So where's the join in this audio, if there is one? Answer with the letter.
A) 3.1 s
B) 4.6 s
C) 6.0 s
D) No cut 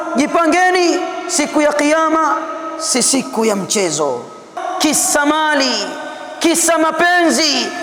B